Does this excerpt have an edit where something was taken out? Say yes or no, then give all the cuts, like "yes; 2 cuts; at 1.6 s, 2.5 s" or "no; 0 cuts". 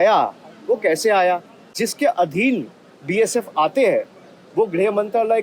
yes; 1 cut; at 1.7 s